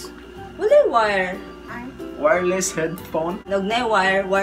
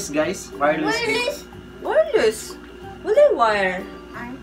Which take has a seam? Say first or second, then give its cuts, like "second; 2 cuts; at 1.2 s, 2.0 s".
first; 1 cut; at 3.4 s